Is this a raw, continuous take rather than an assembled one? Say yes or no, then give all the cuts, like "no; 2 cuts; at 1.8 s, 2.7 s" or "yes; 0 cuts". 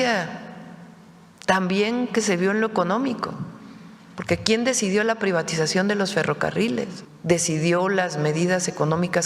no; 1 cut; at 7.1 s